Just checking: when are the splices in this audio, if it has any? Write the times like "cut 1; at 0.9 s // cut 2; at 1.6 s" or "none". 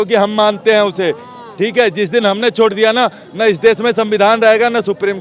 none